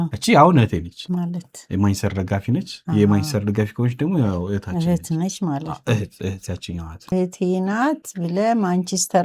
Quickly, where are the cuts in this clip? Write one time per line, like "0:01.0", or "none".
0:07.1